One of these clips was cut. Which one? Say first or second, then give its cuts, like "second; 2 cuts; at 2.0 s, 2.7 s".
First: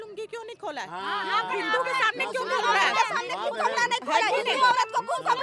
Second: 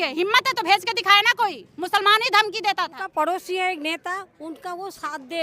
second; 1 cut; at 3.0 s